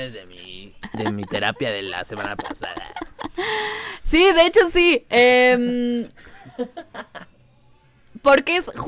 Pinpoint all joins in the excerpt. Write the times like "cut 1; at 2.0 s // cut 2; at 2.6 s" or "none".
none